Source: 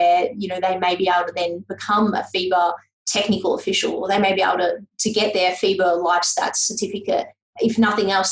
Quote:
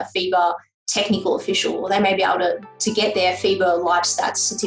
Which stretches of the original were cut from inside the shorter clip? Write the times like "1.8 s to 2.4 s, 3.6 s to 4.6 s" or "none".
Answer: none